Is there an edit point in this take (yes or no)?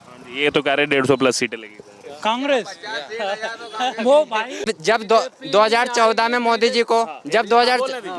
yes